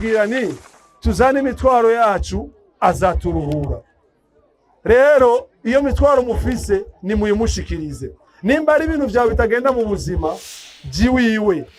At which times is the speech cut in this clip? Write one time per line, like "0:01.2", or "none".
none

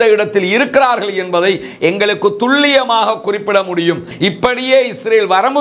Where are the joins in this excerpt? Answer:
0:04.1

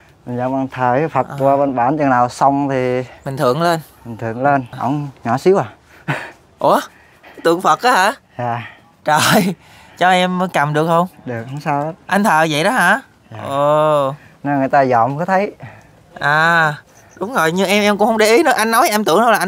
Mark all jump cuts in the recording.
0:04.7

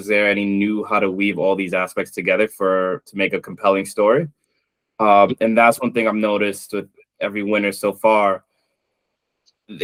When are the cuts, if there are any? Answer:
none

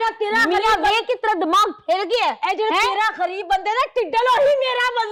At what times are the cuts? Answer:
none

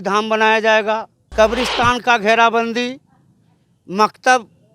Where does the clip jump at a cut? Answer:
0:01.2

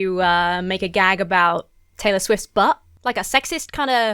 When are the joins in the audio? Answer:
0:02.9

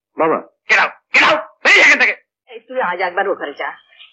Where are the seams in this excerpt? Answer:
0:02.6

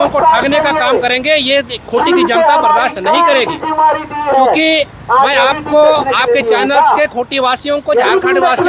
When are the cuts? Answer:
none

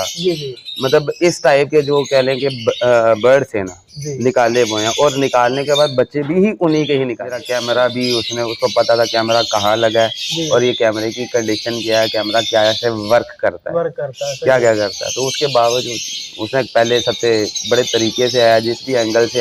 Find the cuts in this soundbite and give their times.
0:07.5

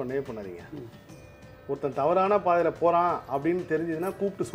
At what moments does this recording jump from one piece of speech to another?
none

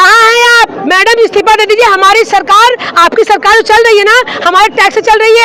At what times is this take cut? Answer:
none

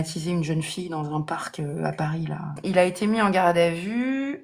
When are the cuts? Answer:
0:02.5

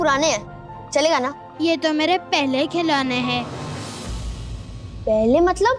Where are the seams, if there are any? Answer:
0:01.4

